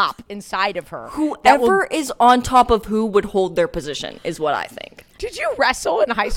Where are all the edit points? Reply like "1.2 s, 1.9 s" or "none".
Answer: 5.1 s